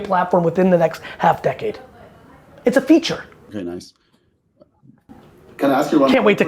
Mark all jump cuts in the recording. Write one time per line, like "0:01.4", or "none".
none